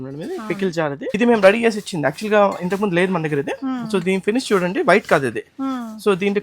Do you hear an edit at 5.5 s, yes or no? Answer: no